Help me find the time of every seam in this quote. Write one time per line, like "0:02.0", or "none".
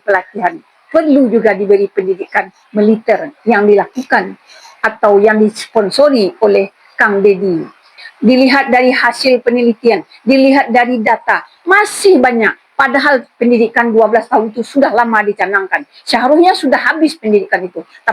0:07.9